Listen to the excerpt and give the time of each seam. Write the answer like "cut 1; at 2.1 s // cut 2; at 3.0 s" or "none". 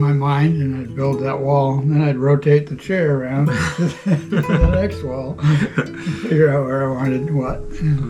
none